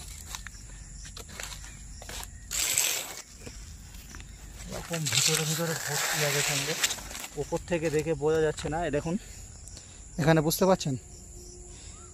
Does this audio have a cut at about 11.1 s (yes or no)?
no